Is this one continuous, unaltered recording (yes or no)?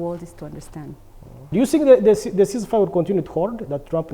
no